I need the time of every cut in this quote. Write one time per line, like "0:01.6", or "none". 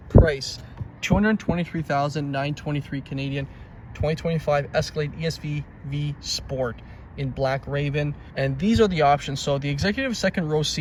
none